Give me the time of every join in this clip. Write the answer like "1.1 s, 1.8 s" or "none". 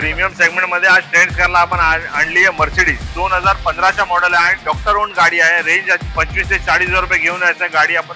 3.1 s, 6.0 s